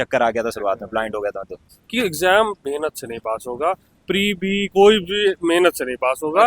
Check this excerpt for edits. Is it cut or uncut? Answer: cut